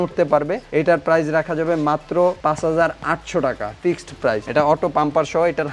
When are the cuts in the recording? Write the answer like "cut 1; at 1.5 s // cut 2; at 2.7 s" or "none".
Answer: cut 1; at 4.4 s